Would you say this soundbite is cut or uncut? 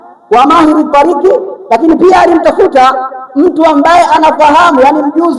uncut